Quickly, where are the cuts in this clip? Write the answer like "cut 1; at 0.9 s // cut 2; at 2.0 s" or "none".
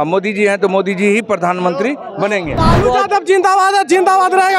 cut 1; at 2.5 s